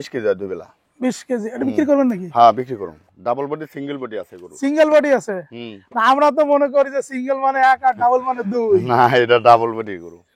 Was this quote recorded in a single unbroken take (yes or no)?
no